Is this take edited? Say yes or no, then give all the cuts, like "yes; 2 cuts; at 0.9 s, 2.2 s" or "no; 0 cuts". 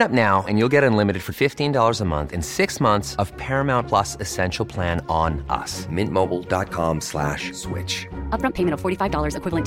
no; 0 cuts